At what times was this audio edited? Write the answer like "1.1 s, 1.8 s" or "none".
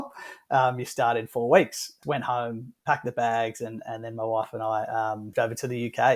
2.0 s, 5.3 s